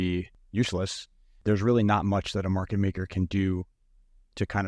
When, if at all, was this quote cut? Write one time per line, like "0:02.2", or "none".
0:01.4